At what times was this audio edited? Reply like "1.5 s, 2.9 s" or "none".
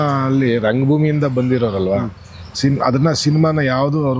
none

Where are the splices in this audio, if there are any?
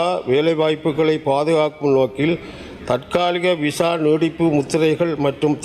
none

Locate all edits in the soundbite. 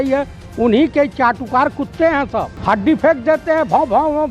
2.5 s

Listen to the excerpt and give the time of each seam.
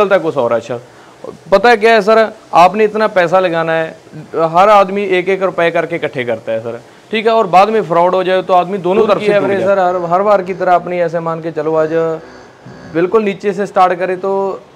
9.2 s

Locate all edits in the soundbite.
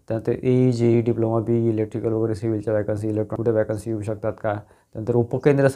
3.4 s

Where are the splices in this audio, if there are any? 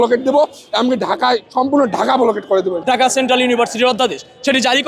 2.8 s

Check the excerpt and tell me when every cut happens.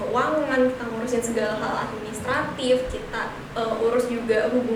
none

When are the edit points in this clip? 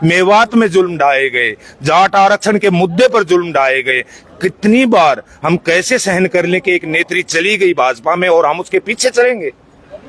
none

